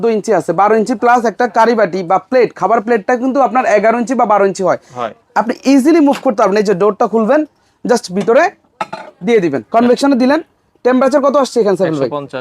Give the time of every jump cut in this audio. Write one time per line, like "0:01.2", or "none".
0:09.6